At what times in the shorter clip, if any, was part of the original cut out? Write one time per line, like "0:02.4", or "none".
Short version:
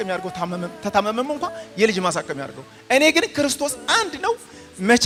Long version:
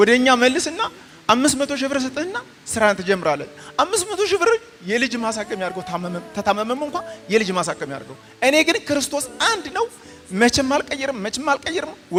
none